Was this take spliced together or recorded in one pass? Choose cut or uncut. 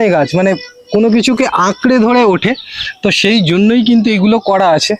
uncut